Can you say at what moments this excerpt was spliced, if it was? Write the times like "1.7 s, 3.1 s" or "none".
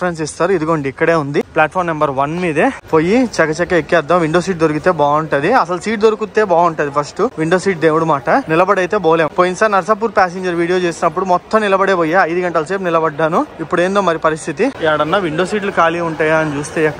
none